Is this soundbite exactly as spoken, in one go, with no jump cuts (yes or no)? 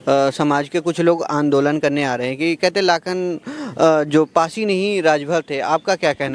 yes